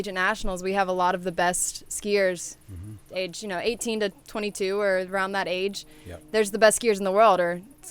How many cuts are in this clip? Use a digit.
0